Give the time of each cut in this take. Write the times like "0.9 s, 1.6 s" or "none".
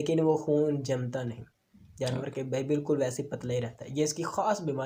none

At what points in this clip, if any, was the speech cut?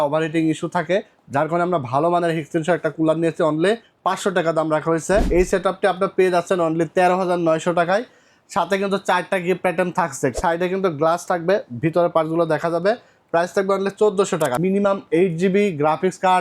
3.9 s, 5.3 s, 10.4 s, 14.6 s

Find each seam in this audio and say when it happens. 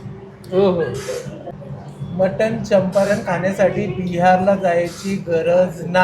1.5 s

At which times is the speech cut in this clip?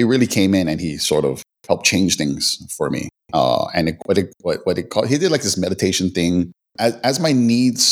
6.6 s

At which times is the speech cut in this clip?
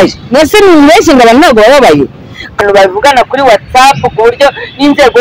2.6 s

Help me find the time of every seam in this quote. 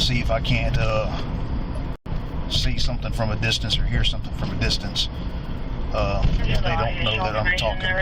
none

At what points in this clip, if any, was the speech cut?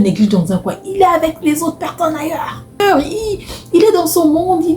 2.8 s

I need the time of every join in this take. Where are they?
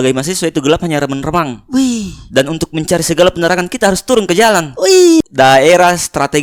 5.2 s

